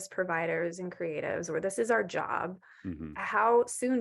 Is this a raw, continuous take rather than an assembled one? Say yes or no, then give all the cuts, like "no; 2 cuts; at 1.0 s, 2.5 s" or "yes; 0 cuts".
yes; 0 cuts